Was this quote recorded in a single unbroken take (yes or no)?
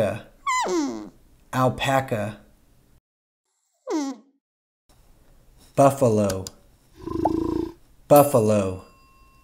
yes